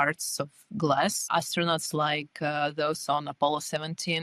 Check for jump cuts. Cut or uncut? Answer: cut